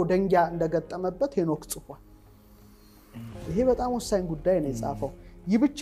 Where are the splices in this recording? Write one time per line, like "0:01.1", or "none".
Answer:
none